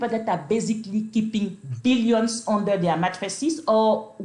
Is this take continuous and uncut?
yes; 0 cuts

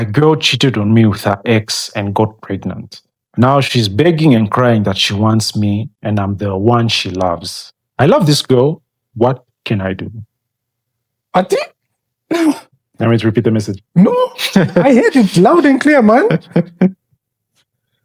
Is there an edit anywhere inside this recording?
no; 0 cuts

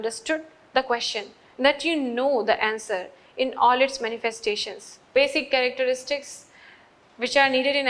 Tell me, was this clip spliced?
yes; 1 cut; at 5.0 s

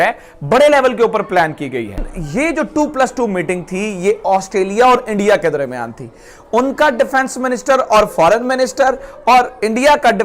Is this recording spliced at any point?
yes; 1 cut; at 1.8 s

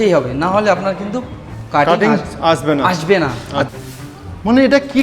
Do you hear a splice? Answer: yes; 1 cut; at 3.7 s

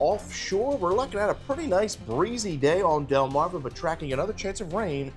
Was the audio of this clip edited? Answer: no; 0 cuts

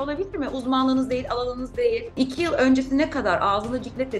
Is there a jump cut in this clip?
yes; 1 cut; at 2.1 s

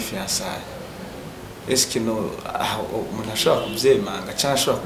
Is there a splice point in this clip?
no; 0 cuts

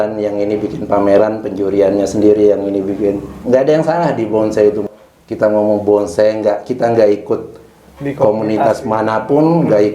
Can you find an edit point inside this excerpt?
yes; 2 cuts; at 3.3 s, 4.8 s

